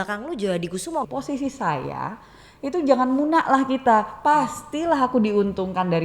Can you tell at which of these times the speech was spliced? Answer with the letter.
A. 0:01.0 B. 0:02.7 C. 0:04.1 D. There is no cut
A